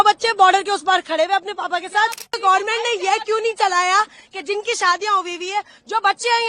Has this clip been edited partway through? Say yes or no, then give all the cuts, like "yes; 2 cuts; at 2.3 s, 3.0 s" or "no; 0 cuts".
yes; 1 cut; at 2.4 s